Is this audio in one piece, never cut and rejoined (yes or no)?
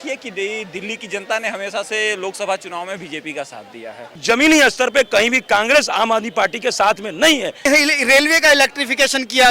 no